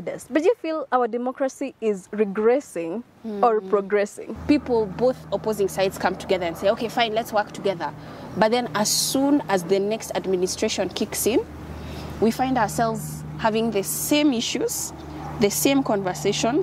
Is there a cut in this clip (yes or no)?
yes